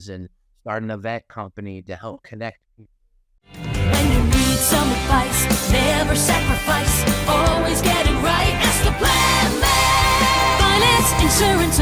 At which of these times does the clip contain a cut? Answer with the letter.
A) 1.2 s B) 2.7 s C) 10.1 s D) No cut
B